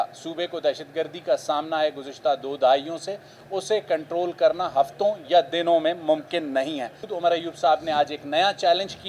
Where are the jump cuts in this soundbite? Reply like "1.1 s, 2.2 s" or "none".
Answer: 7.0 s